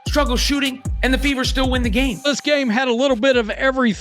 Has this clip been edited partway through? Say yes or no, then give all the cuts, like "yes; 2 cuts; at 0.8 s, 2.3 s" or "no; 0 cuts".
yes; 1 cut; at 2.2 s